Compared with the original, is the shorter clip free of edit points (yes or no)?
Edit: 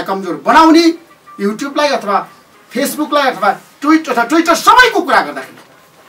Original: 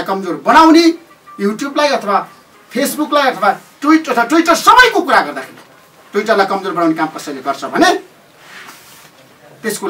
yes